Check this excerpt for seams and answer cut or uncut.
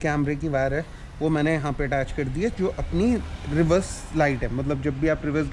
uncut